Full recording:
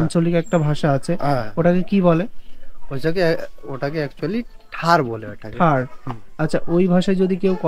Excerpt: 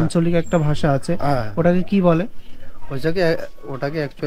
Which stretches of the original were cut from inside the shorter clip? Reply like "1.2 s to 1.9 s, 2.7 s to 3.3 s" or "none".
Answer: none

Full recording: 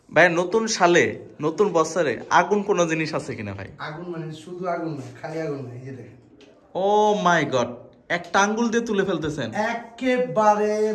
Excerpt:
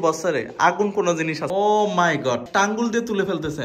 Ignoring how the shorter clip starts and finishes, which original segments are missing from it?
3.2 s to 6.7 s, 7.7 s to 8.3 s

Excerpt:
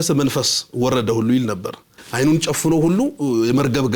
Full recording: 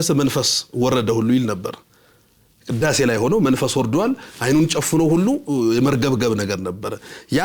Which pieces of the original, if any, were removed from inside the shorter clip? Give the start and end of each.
2.0 s to 4.3 s

